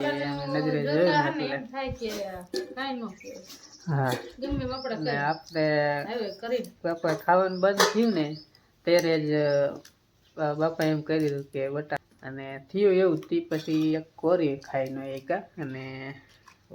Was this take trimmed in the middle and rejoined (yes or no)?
yes